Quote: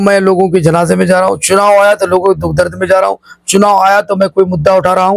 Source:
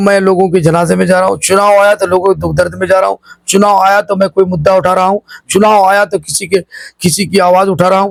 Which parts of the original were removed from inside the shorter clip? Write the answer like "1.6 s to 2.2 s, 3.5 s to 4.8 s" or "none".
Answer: none